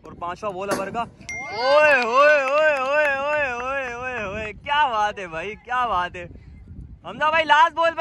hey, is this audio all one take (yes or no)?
yes